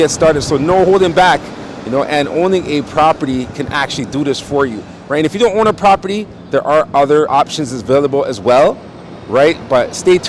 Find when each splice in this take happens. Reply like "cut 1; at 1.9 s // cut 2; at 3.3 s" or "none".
cut 1; at 7.3 s